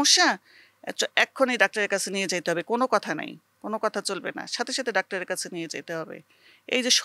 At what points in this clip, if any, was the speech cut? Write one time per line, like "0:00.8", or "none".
none